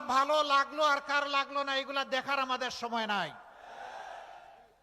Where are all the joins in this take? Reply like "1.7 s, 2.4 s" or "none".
3.0 s